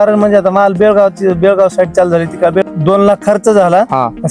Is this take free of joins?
no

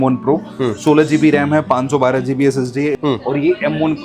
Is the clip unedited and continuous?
no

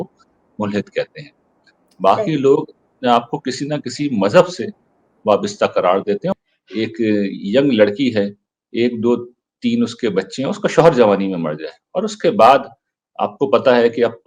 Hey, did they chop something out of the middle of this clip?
yes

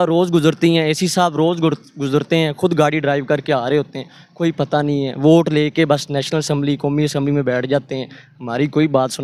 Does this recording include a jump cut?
no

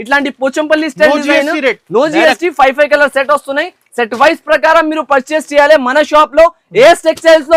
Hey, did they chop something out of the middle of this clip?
no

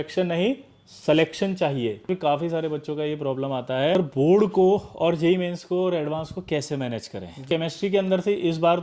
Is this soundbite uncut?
no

